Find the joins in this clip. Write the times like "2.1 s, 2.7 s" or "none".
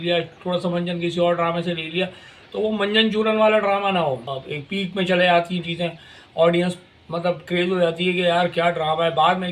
4.2 s